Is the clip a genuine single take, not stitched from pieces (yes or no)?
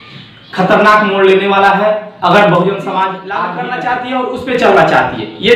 no